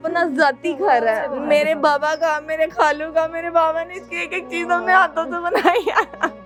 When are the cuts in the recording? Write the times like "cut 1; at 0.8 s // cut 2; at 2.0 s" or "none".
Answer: none